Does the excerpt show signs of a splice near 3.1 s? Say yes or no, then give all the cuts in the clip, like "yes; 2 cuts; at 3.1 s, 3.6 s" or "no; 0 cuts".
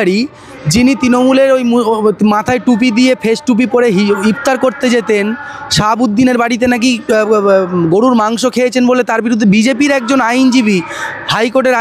no; 0 cuts